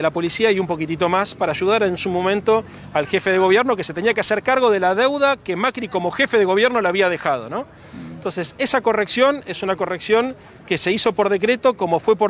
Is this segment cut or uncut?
uncut